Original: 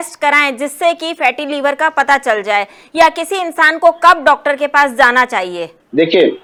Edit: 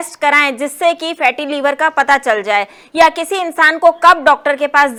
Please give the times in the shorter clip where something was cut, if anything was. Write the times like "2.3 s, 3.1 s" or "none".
none